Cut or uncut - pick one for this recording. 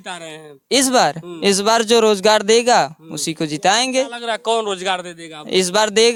uncut